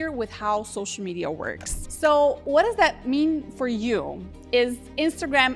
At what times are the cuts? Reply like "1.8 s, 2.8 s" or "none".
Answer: 1.9 s, 2.4 s